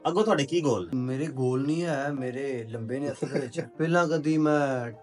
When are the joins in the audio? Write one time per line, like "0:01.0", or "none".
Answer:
0:00.9
0:03.6